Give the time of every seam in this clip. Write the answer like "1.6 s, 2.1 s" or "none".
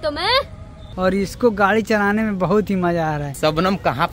0.9 s, 3.3 s